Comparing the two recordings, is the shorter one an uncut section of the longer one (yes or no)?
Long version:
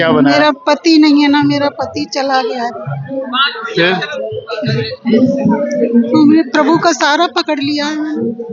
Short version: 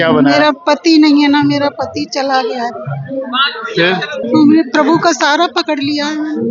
no